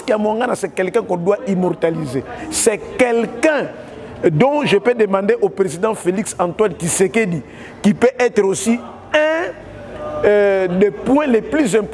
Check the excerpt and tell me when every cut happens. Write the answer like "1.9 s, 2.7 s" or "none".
none